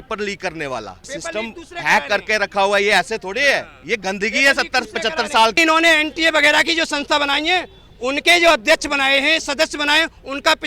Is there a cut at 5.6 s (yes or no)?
yes